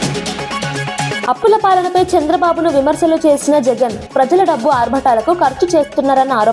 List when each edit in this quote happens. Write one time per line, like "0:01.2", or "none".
0:01.2